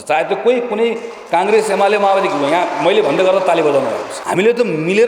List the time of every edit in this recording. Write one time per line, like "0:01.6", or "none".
0:04.1